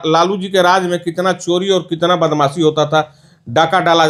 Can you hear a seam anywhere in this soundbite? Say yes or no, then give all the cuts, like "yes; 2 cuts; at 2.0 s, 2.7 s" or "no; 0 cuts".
no; 0 cuts